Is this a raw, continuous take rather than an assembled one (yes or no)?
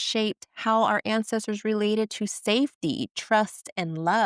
yes